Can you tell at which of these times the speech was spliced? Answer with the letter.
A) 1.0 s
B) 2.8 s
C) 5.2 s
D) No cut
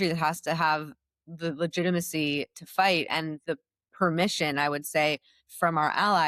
D